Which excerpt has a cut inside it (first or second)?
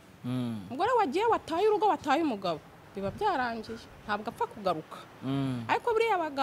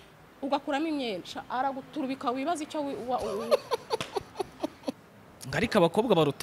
second